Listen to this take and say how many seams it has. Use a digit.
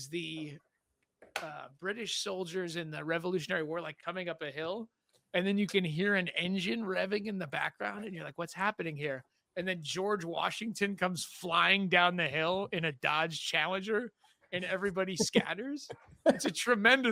0